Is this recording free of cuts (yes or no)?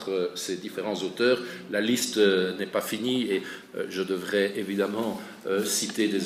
yes